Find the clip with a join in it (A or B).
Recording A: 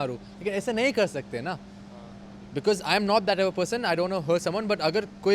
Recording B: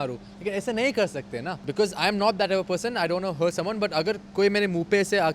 B